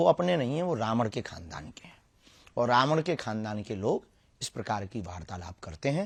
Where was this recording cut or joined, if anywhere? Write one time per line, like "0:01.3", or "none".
none